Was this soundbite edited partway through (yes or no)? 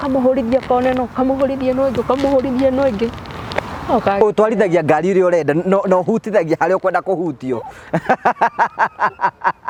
no